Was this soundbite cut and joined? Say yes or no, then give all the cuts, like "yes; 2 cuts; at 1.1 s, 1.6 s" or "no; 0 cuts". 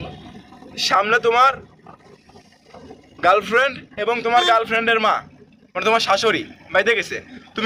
no; 0 cuts